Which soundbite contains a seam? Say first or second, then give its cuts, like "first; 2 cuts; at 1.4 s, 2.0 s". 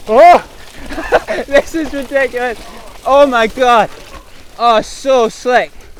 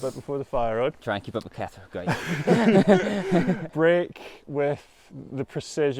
second; 2 cuts; at 1.0 s, 3.6 s